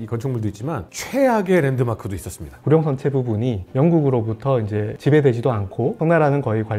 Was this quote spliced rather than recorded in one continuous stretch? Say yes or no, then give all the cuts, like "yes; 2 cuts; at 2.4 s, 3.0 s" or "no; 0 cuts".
yes; 1 cut; at 2.6 s